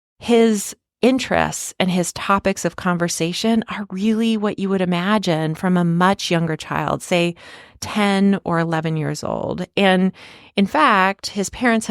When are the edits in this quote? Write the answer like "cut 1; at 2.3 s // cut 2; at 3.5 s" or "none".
cut 1; at 0.9 s